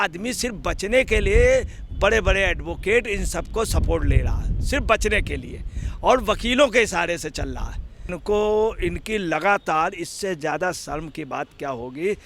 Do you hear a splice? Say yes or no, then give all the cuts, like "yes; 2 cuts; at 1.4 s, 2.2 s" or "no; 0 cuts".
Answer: yes; 1 cut; at 8.1 s